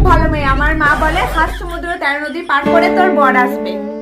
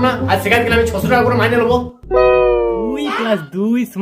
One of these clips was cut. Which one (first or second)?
second